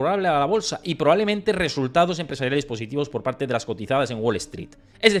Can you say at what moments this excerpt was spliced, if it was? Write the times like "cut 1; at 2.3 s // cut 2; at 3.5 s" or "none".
none